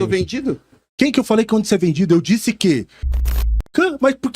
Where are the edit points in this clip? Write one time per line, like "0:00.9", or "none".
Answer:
0:03.2